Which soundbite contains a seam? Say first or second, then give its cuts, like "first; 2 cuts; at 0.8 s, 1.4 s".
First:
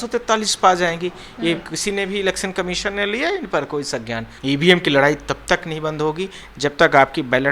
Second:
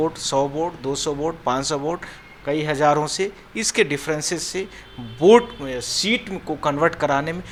first; 1 cut; at 4.3 s